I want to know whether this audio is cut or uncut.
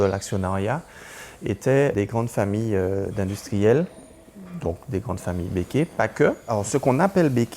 cut